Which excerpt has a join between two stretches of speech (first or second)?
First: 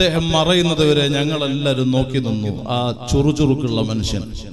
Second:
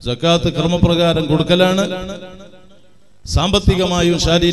first